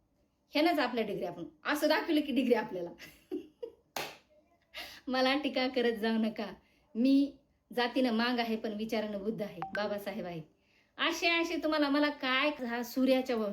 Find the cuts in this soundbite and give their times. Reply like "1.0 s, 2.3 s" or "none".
12.5 s